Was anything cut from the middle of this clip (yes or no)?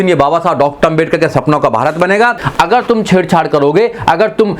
yes